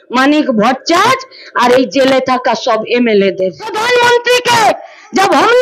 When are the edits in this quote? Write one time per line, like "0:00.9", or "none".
0:03.8